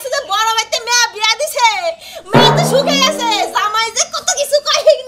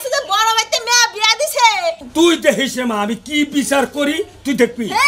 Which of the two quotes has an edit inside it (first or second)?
second